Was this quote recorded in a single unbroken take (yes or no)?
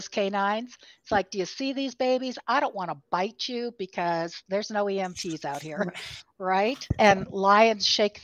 no